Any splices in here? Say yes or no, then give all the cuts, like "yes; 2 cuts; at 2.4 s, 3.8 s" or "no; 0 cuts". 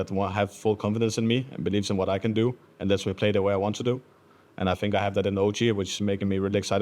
no; 0 cuts